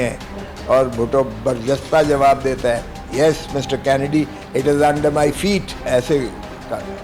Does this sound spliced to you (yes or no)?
yes